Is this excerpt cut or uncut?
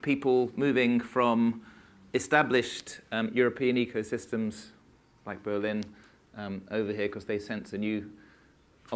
uncut